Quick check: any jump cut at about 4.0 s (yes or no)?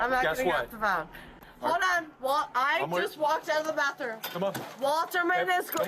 no